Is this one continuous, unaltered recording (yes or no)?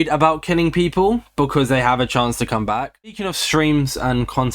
no